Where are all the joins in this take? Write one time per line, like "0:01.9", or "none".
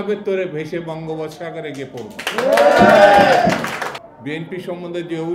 0:04.0

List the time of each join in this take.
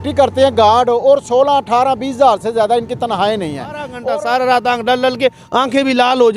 0:03.9

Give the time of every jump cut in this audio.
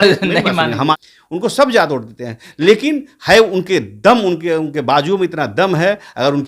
0:00.9

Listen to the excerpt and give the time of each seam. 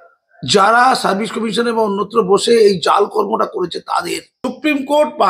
0:04.3

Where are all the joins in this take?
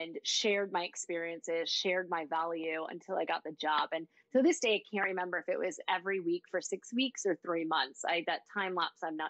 none

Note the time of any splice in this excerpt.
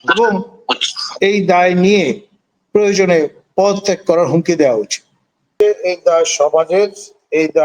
0:05.5

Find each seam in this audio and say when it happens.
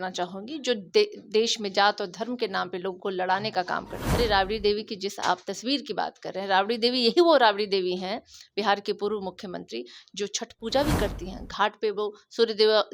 0:04.0

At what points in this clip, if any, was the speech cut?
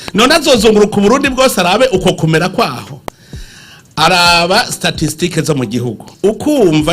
0:06.0

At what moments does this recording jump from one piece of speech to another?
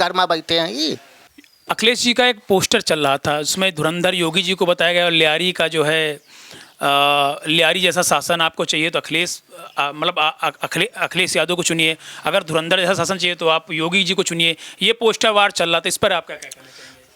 none

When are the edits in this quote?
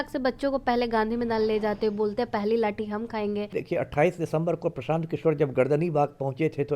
0:03.6

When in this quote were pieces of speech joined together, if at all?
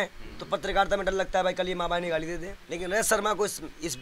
0:02.6

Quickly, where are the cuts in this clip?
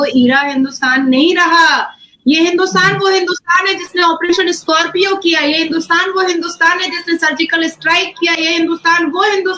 0:01.9

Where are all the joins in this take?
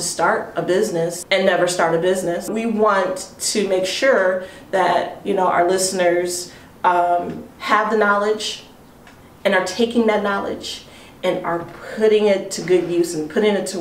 0:01.2
0:02.5

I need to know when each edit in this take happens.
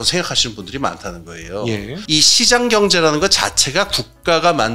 0:02.0

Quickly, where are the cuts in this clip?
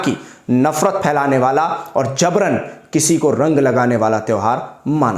none

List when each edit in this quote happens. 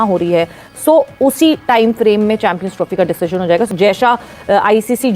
0:03.7

